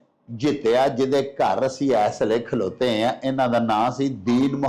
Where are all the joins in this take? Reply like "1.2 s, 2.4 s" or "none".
none